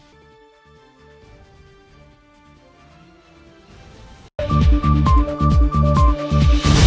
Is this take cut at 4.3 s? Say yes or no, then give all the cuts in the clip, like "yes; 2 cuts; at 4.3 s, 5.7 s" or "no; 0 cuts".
yes; 1 cut; at 4.3 s